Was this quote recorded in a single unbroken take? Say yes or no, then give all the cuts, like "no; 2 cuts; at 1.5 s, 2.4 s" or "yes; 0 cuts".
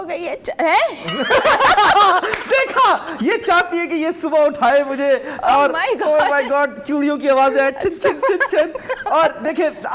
yes; 0 cuts